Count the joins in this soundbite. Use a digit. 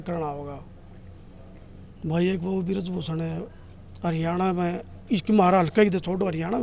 0